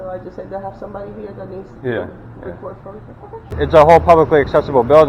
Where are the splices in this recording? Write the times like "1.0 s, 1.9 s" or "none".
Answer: 3.5 s